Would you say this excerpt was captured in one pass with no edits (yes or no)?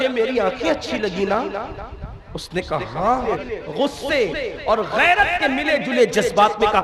no